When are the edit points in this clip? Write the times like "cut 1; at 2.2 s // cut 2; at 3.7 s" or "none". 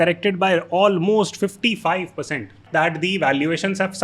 cut 1; at 2.6 s